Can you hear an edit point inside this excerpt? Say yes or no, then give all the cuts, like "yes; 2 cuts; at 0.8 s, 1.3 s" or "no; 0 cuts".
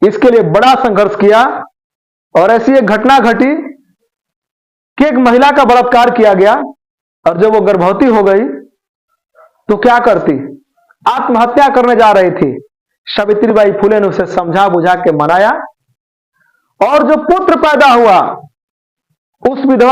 no; 0 cuts